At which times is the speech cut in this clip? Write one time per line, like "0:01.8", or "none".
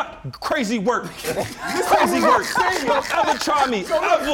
none